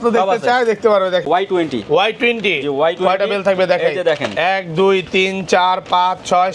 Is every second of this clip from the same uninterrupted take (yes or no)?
no